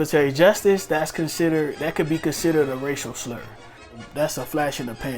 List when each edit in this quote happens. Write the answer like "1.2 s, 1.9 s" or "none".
3.9 s